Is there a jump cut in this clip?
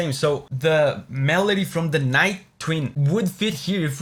no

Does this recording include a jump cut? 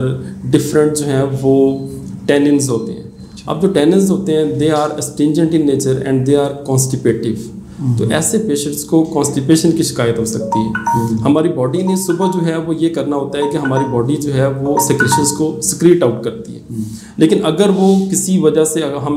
no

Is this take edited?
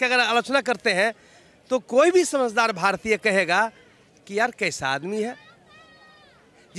no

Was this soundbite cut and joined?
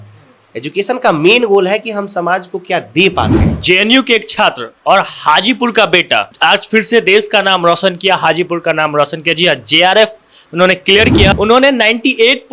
yes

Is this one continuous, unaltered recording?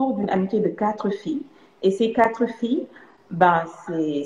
yes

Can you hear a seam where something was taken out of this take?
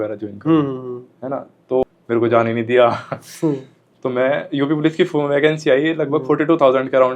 yes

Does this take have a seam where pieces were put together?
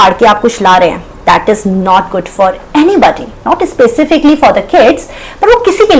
no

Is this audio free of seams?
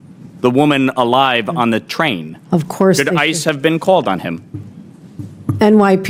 yes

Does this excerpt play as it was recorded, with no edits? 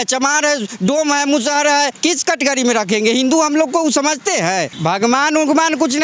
no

